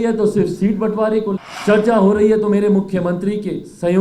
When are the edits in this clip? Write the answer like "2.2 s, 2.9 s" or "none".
1.5 s